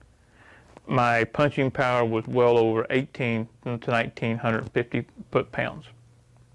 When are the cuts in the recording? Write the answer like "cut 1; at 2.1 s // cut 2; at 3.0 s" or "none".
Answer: none